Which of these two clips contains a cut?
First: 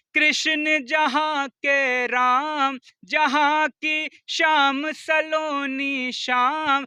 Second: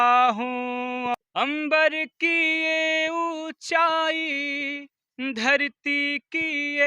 second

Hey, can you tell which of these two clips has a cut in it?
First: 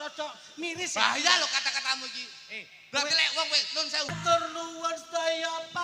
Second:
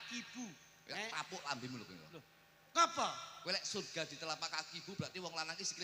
first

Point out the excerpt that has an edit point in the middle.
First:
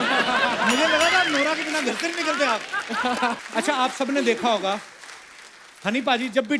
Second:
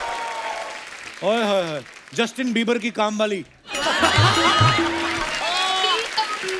first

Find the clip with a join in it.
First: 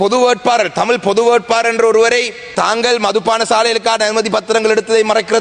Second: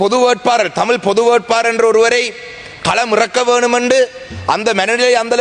first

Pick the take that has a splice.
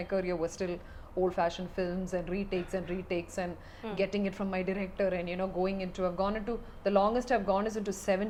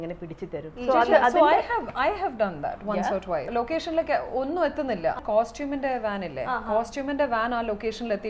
second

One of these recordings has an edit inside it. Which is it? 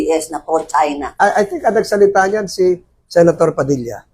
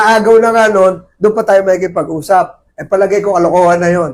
first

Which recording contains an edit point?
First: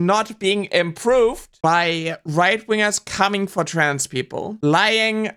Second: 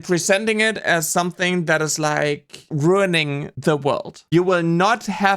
second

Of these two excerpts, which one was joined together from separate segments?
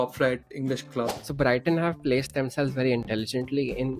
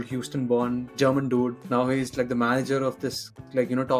first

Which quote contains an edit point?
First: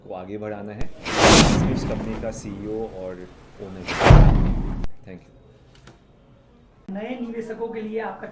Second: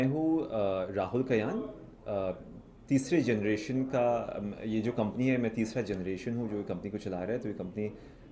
first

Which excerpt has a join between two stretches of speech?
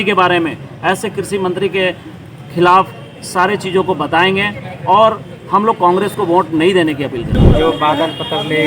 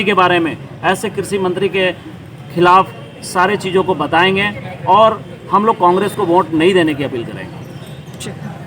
first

